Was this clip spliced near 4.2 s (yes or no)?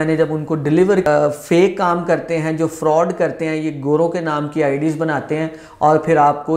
no